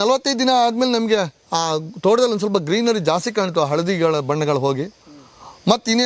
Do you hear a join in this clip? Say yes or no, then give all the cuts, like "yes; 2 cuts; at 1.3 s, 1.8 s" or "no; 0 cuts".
no; 0 cuts